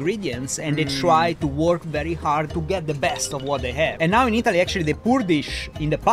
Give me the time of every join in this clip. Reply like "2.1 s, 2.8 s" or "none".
2.5 s, 3.9 s